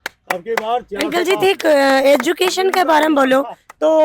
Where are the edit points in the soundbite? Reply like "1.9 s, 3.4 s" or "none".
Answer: none